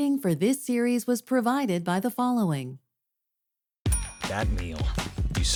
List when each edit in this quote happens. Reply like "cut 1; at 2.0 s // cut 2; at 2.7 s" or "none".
none